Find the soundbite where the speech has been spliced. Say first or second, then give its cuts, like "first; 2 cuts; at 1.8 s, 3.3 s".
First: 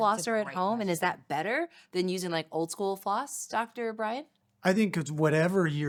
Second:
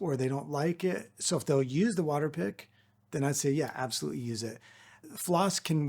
second; 1 cut; at 5.0 s